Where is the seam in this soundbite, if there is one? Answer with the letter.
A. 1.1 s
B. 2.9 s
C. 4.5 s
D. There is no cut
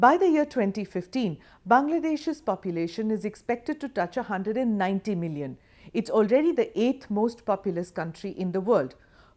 B